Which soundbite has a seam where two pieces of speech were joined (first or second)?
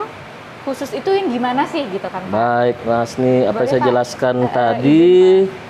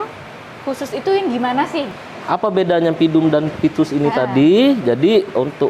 second